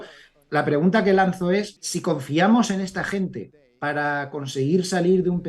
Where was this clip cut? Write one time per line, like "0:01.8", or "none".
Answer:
0:01.8